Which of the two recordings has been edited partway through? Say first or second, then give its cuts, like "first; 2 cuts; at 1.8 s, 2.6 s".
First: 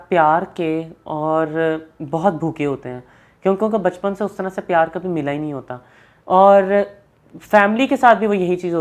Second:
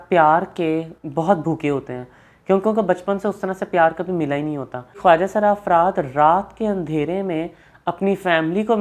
second; 2 cuts; at 1.0 s, 5.0 s